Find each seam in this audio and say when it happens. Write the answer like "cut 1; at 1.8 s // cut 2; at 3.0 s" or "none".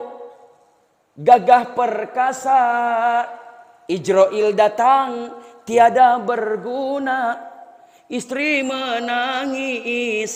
none